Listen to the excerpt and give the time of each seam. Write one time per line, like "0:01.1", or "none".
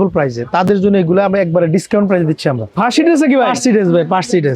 0:02.7